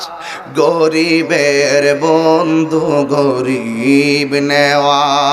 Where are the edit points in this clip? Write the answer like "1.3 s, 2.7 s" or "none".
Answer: none